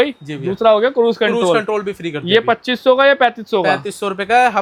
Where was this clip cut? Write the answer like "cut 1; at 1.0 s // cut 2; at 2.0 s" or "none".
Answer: none